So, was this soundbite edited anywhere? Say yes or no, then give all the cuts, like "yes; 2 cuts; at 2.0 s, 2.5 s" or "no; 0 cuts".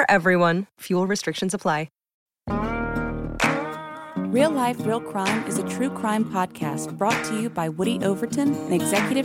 yes; 1 cut; at 2.5 s